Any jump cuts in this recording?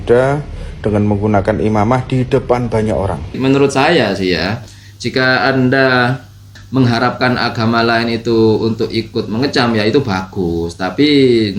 yes; 2 cuts; at 3.4 s, 6.6 s

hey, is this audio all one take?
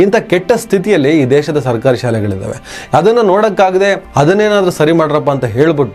yes; 0 cuts

